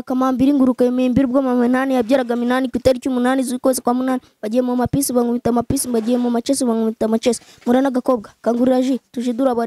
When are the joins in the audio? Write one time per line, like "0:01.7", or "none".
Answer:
none

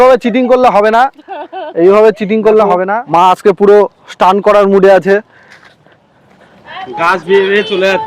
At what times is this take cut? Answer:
0:02.9

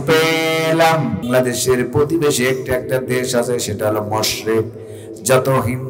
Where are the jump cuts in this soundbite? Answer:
0:01.2

